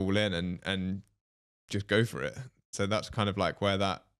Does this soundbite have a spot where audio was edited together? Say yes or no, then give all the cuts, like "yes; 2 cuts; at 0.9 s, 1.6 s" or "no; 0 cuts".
no; 0 cuts